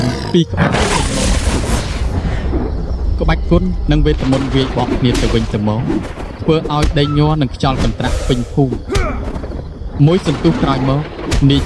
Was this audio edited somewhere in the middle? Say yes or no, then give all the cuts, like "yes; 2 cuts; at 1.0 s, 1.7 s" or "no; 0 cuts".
yes; 1 cut; at 1.3 s